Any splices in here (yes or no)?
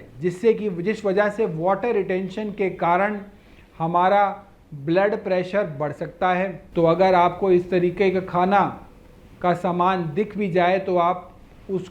yes